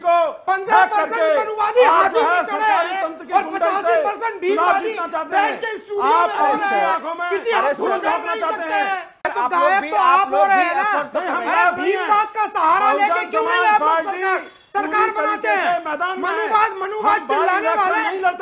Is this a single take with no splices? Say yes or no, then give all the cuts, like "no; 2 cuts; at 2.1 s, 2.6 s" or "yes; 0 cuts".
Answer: no; 1 cut; at 9.2 s